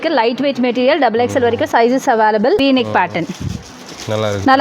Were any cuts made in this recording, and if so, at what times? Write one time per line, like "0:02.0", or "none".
0:02.6